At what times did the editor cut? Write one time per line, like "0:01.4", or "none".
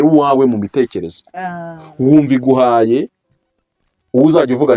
none